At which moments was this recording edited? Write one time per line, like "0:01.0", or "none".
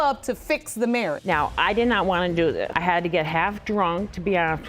0:01.2
0:02.7